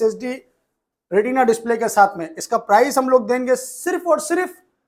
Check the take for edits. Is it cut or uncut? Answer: uncut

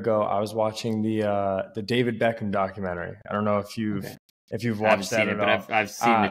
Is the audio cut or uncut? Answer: uncut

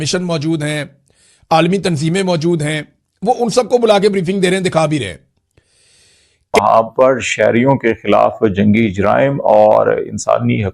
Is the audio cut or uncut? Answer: cut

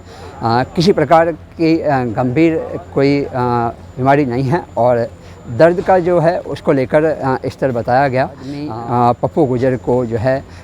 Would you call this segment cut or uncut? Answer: cut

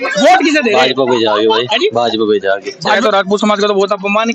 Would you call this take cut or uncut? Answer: cut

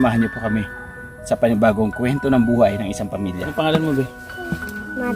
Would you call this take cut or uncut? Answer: cut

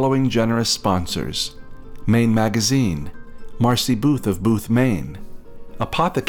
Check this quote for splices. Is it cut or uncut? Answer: uncut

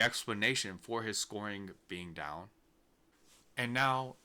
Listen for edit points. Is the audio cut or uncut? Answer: uncut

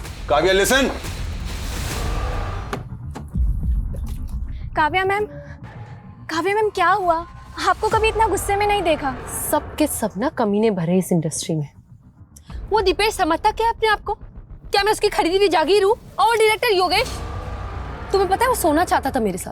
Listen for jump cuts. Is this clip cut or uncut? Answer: cut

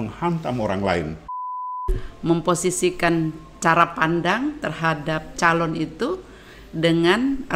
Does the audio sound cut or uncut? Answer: cut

